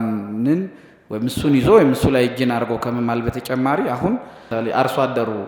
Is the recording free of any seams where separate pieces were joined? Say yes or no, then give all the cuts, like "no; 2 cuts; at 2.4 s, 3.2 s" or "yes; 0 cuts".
no; 1 cut; at 4.4 s